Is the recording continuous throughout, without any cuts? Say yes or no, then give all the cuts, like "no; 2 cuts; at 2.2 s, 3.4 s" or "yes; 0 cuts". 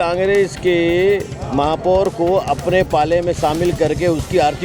yes; 0 cuts